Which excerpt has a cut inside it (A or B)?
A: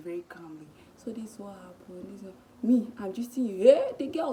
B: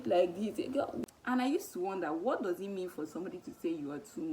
B